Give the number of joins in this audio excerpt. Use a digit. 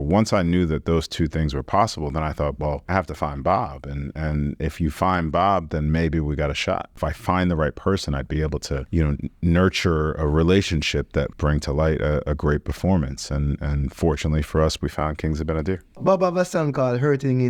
5